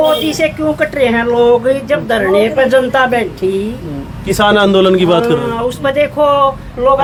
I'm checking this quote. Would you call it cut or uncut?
uncut